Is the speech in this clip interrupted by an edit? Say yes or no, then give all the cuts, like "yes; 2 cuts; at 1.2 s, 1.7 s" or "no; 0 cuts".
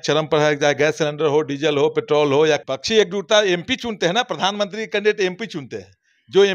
yes; 1 cut; at 2.6 s